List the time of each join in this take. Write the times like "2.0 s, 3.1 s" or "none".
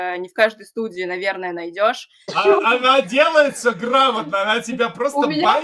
2.3 s